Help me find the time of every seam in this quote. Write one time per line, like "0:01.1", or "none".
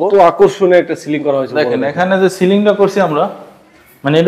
none

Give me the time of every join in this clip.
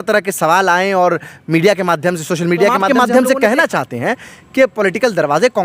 0:02.8

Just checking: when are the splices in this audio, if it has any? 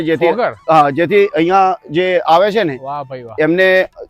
none

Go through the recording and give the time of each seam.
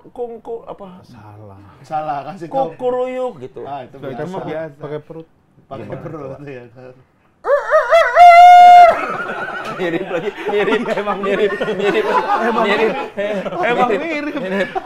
none

